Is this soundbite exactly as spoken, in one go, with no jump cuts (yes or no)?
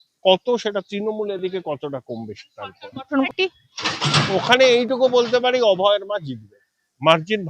no